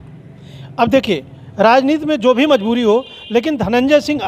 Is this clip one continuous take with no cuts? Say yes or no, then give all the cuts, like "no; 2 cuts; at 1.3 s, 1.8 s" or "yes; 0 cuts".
yes; 0 cuts